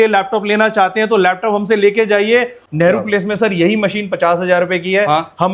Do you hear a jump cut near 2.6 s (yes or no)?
yes